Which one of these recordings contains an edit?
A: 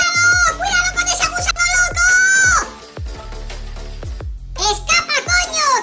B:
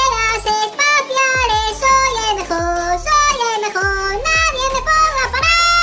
A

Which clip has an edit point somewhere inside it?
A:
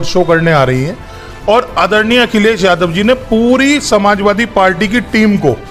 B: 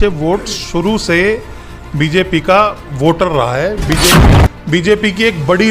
B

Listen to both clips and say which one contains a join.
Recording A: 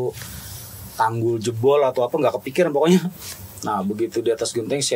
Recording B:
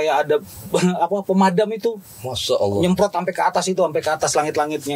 A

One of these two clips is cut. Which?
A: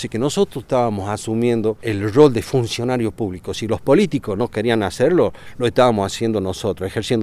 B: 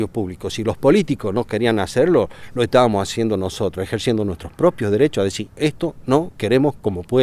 A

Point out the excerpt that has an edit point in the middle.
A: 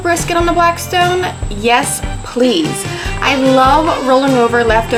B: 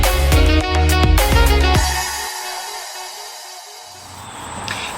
B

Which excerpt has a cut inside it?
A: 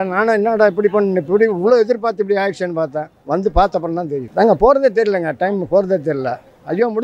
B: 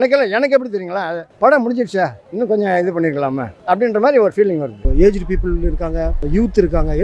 B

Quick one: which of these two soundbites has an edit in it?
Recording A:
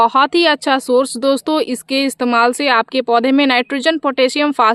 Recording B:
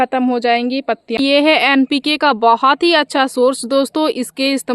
B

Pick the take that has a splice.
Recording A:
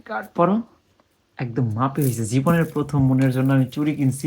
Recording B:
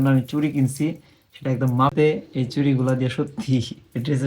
B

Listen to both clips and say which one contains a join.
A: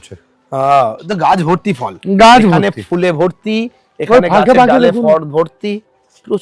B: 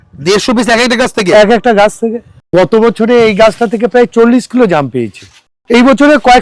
B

